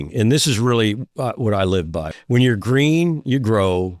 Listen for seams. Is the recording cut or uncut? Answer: cut